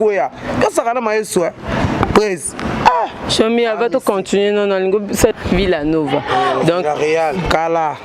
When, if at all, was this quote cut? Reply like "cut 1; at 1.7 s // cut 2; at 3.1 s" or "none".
cut 1; at 5.3 s